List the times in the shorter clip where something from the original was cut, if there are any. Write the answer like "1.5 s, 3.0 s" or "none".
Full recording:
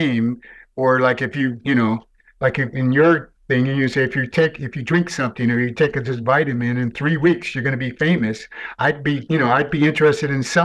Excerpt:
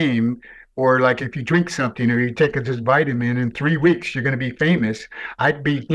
1.2 s